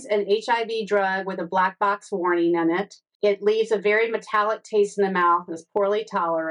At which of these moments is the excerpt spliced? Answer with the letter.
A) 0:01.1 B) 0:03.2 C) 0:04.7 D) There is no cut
B